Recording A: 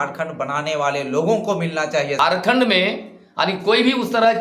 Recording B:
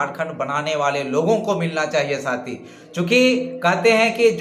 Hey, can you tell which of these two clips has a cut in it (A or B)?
A